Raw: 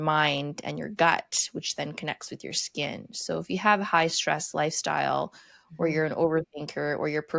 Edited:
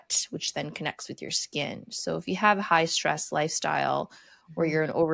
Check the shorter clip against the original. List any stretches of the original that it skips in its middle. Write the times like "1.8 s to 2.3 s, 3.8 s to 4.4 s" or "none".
none